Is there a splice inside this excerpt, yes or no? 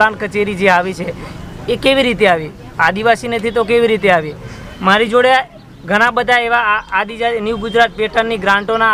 no